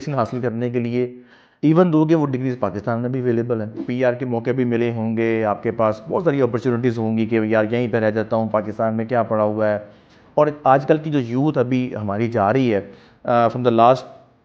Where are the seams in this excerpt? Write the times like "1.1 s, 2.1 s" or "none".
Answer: 3.8 s